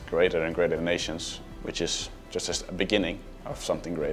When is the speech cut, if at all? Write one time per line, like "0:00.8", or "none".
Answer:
0:01.4
0:02.1